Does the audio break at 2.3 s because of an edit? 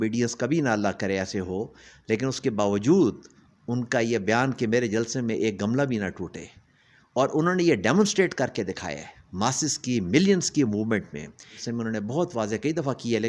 no; 1 cut; at 11.6 s

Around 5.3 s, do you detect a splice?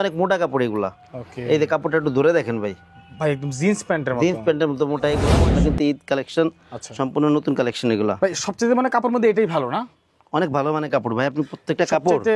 yes; 1 cut; at 5.3 s

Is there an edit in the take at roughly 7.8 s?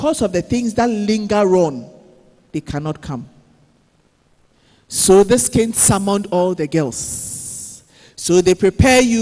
no; 1 cut; at 4.5 s

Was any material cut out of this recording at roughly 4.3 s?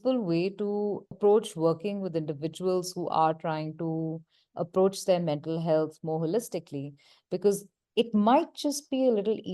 no; 2 cuts; at 1.1 s, 7.8 s

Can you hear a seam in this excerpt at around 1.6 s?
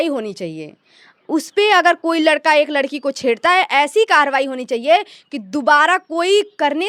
no; 0 cuts

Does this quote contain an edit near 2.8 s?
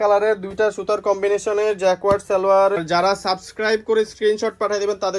yes; 1 cut; at 2.8 s

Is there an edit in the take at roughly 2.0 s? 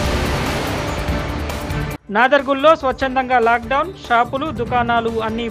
yes; 1 cut; at 2.0 s

